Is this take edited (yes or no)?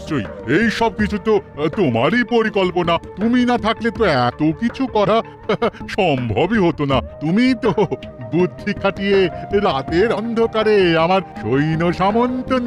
no